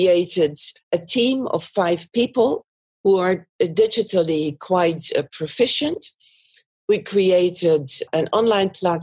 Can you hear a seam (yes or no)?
no